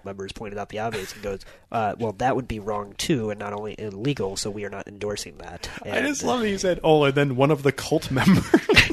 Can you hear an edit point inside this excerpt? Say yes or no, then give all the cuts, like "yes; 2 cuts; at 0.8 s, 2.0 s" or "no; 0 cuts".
no; 0 cuts